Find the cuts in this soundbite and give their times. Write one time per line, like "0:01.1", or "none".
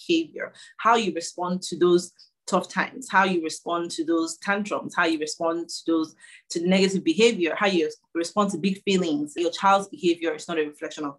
0:09.4